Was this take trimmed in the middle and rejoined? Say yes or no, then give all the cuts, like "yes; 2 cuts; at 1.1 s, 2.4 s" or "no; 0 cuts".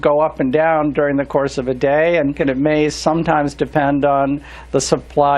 yes; 1 cut; at 2.4 s